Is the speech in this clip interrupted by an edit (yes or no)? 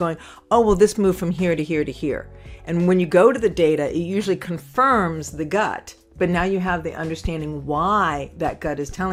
no